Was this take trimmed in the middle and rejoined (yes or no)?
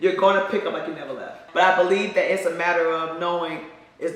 yes